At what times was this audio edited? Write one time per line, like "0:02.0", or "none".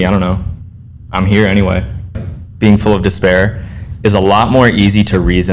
0:02.2